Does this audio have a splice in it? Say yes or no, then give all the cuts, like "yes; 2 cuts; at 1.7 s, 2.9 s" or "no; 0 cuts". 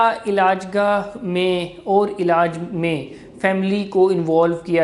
no; 0 cuts